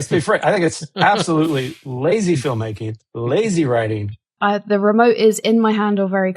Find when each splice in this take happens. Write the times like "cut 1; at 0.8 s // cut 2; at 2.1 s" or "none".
cut 1; at 4.4 s